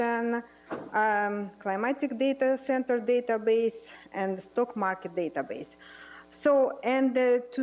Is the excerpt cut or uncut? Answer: cut